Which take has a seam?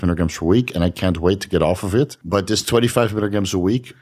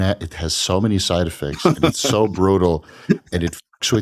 first; 1 cut; at 2.2 s

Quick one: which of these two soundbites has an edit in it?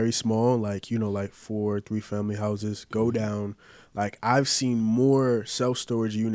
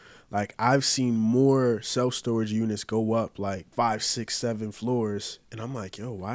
second; 1 cut; at 3.6 s

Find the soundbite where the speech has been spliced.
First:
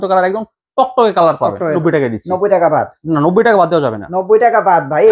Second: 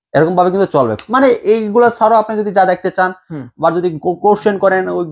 first; 1 cut; at 1.8 s

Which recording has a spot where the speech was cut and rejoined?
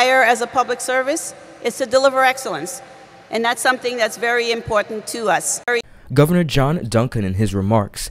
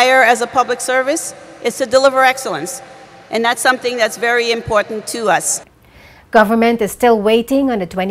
second; 1 cut; at 5.5 s

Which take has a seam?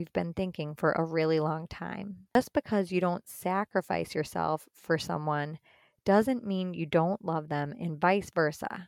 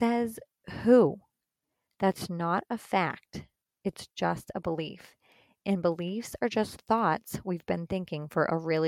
first; 1 cut; at 2.3 s

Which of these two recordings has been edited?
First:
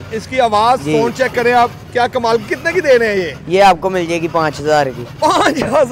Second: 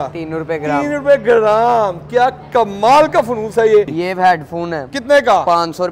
second; 1 cut; at 4.0 s

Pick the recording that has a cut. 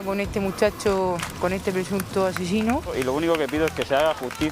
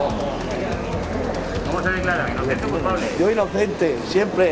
first; 1 cut; at 2.9 s

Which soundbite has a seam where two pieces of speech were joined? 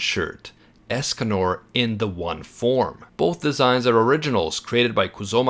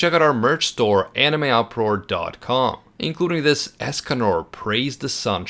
first; 1 cut; at 3.0 s

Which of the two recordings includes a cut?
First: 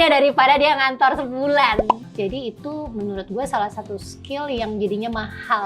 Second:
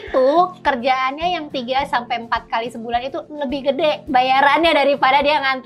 first; 1 cut; at 2.0 s

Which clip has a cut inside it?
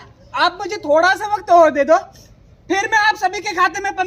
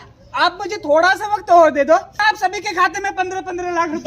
second; 1 cut; at 2.2 s

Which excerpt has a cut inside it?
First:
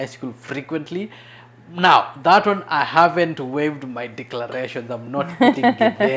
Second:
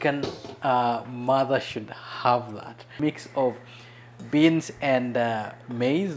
second; 1 cut; at 3.0 s

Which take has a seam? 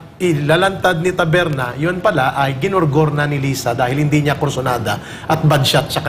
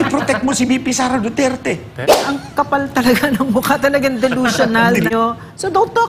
second; 2 cuts; at 2.3 s, 5.1 s

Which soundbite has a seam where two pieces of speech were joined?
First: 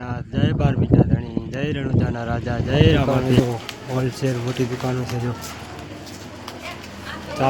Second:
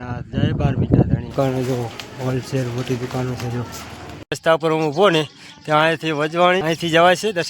second; 3 cuts; at 1.3 s, 4.3 s, 6.6 s

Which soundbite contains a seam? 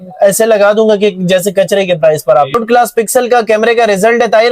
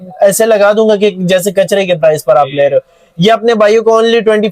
first; 1 cut; at 2.5 s

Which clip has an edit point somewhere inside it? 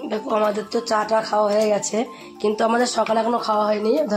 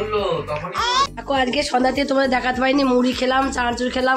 second; 1 cut; at 1.2 s

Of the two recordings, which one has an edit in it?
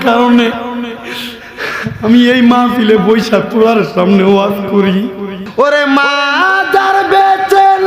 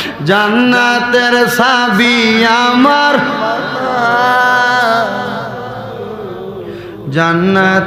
first; 1 cut; at 5.4 s

